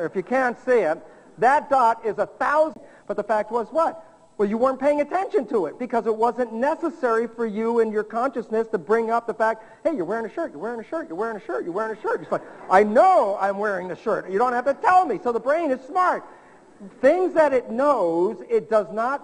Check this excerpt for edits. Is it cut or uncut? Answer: uncut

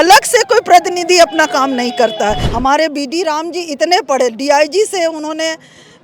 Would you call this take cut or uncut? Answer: cut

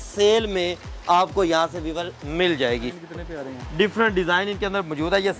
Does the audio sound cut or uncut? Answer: cut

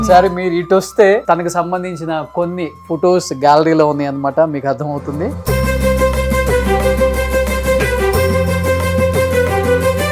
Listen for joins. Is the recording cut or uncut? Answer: cut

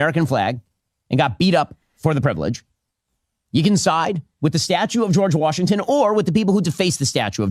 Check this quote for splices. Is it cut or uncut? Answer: uncut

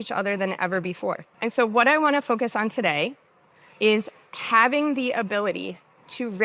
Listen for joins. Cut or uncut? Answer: cut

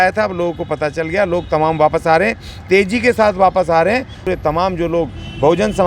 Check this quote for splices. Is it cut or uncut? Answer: cut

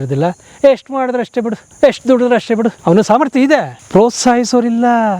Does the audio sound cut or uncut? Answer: cut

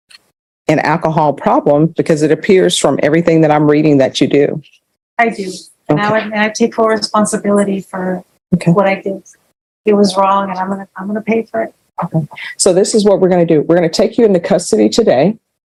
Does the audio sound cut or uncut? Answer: uncut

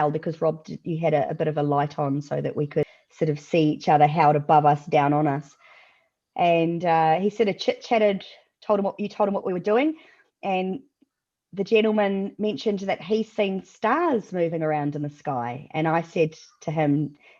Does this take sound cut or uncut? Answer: cut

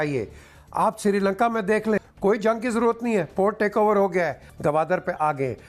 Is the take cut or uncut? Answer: cut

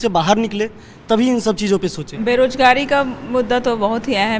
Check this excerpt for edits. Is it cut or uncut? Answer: cut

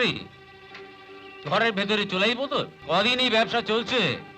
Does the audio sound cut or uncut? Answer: cut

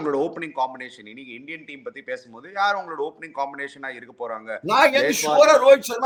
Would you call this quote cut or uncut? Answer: uncut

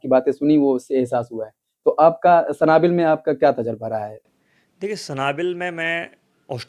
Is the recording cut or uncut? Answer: uncut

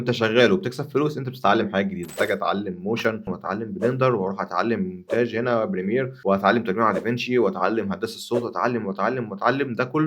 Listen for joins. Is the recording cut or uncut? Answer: cut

